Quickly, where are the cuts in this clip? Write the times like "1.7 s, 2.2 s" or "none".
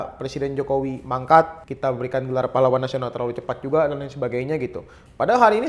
1.6 s

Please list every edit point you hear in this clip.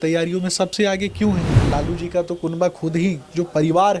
1.6 s

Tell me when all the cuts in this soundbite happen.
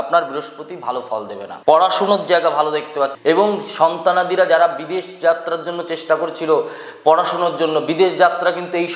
1.4 s, 3.2 s

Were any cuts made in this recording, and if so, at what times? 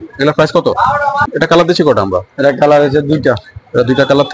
1.3 s

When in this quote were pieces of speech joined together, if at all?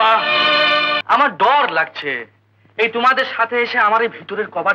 1.0 s

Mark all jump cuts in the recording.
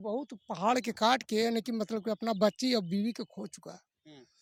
none

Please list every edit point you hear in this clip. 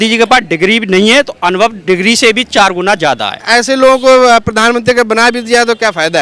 3.4 s

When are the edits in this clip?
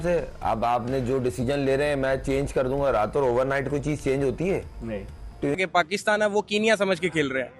5.6 s

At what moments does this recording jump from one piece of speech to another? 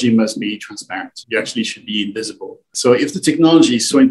2.7 s

